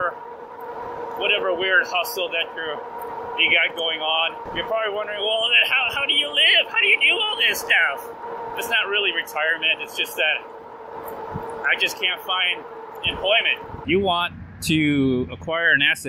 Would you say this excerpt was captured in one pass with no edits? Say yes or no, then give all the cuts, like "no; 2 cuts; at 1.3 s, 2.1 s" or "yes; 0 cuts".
no; 3 cuts; at 4.4 s, 8.2 s, 13.7 s